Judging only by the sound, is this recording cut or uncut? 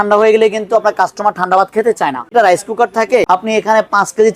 cut